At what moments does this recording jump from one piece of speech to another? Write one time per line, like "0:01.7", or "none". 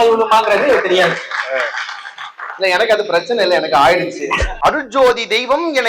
0:04.4